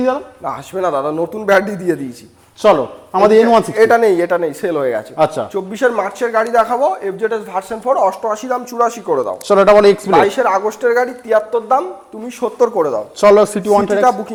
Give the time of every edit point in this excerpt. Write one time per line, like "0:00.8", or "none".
none